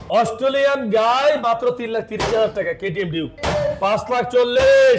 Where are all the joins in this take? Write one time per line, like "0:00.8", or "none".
0:03.4